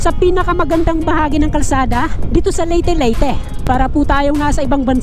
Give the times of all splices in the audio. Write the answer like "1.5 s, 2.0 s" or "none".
none